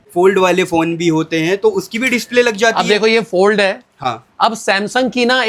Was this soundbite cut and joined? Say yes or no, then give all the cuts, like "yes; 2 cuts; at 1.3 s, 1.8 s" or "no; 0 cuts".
no; 0 cuts